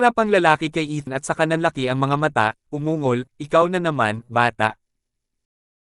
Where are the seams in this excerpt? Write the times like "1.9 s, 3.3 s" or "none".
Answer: 1.1 s